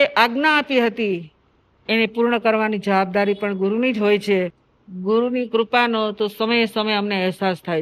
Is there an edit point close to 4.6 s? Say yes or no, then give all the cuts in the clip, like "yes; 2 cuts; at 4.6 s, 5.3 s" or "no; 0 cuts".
yes; 1 cut; at 4.6 s